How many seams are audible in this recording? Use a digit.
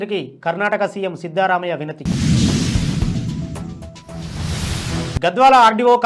2